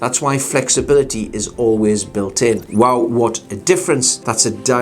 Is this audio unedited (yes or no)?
no